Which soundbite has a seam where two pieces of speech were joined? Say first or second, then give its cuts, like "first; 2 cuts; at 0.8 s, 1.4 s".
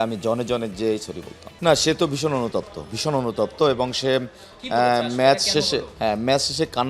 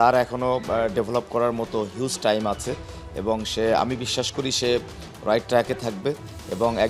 first; 1 cut; at 1.5 s